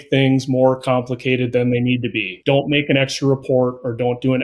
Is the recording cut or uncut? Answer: cut